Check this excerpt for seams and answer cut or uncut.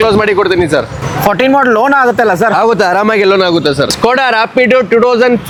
uncut